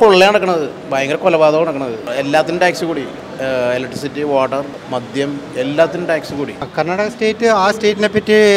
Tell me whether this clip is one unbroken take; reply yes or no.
no